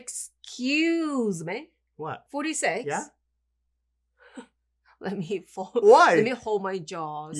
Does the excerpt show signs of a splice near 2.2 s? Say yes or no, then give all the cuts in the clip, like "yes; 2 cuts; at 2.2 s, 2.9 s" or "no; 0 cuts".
yes; 1 cut; at 2.2 s